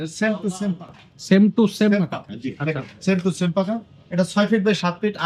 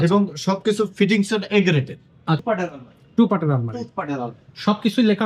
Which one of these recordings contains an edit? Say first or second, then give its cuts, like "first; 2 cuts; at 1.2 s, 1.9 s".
second; 1 cut; at 2.4 s